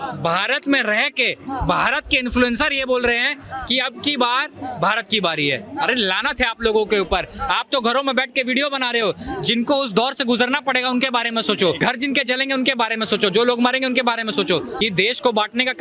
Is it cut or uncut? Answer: cut